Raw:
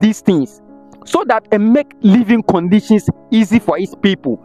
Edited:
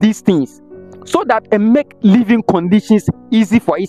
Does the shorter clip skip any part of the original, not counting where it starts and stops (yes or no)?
no